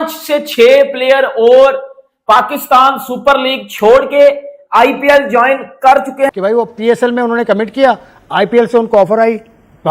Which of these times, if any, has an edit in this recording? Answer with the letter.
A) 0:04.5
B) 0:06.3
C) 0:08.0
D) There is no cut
B